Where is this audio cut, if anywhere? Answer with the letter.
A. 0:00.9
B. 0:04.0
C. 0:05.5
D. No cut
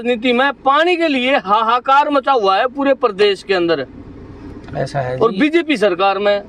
D